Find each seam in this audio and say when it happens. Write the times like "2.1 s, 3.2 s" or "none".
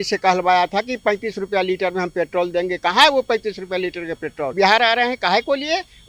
4.5 s

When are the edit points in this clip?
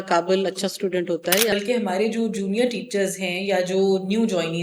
1.5 s

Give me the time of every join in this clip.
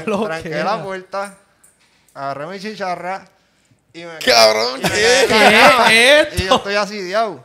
none

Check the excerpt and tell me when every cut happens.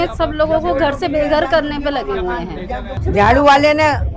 2.9 s

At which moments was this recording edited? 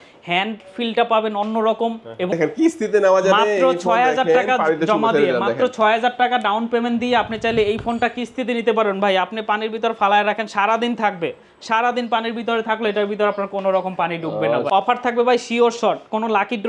2.3 s, 14.7 s

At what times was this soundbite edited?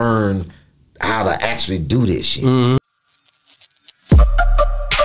2.8 s

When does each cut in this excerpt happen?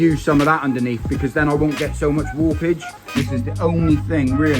3.2 s

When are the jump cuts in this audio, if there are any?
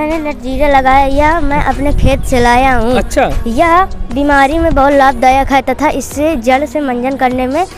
none

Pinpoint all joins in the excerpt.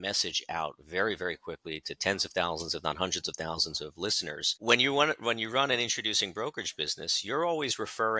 4.5 s

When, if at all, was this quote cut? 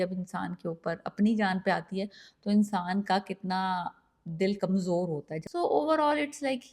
5.4 s

